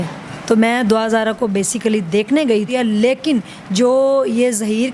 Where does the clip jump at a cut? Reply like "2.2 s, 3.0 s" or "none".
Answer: 2.7 s